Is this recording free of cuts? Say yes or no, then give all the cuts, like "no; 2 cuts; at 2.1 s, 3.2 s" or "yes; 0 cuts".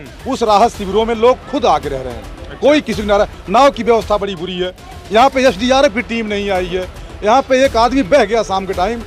yes; 0 cuts